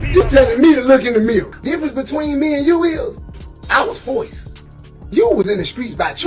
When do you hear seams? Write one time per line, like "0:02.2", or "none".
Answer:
none